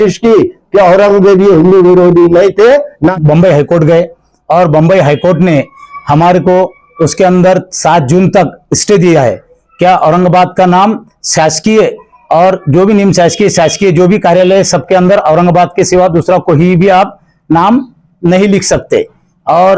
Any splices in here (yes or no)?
yes